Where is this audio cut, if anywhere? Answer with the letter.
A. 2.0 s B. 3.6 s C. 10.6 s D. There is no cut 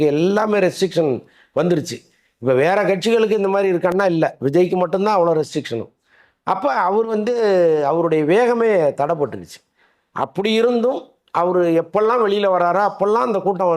D